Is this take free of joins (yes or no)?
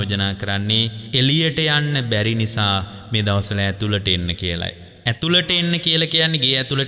no